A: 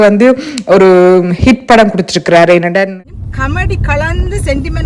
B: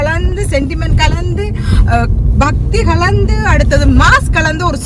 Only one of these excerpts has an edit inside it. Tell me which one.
A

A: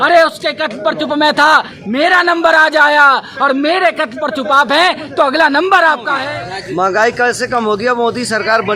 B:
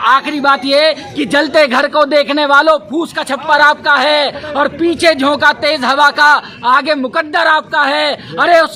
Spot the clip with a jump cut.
A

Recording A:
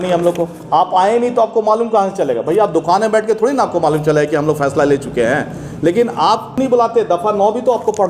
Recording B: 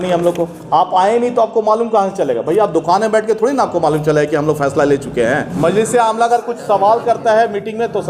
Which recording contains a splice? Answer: B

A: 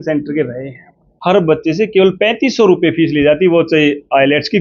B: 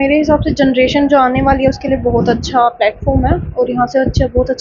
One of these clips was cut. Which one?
A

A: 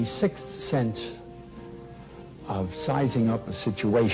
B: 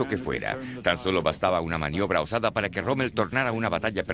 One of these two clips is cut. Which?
A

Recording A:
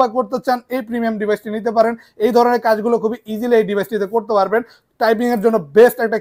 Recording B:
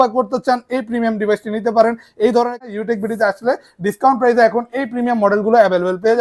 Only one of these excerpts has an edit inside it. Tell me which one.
B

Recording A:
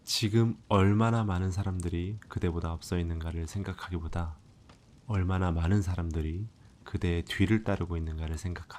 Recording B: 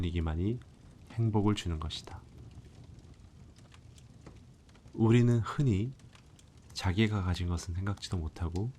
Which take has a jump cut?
B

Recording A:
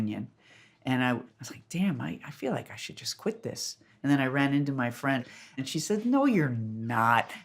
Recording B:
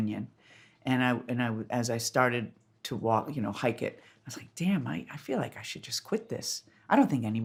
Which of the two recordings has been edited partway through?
A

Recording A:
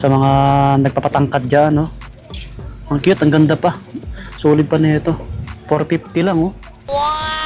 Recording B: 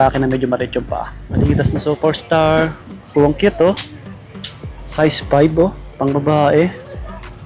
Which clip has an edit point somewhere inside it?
B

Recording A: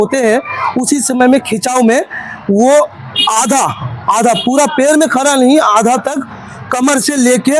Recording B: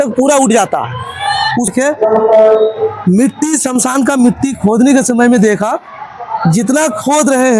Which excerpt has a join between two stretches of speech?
B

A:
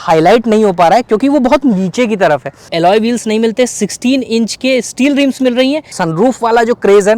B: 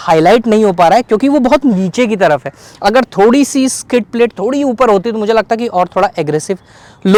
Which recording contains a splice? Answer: A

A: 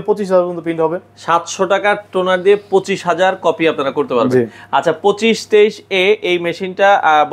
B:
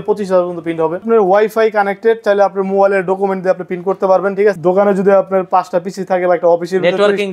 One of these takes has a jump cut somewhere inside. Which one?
B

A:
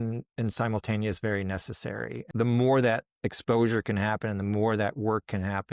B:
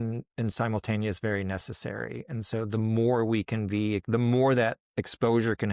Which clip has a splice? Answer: A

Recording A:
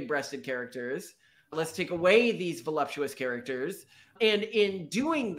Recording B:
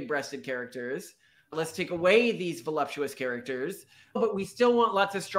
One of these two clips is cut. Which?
B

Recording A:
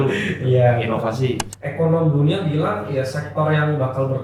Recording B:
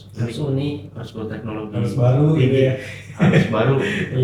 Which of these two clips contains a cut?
A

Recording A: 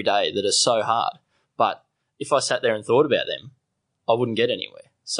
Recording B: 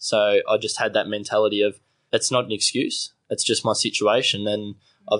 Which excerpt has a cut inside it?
B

